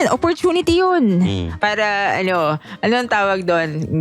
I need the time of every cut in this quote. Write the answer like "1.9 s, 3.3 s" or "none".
1.5 s